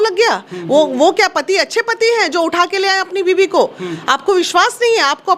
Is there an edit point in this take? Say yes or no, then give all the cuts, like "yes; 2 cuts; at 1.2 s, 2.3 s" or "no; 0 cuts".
no; 0 cuts